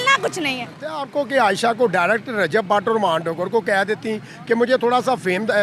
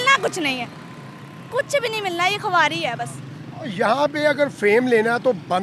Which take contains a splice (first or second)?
first